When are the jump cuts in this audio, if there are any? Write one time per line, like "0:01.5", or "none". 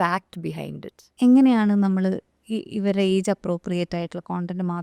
0:01.1